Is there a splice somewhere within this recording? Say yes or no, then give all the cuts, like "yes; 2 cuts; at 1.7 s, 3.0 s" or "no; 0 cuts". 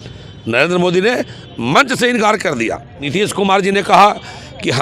yes; 1 cut; at 2.9 s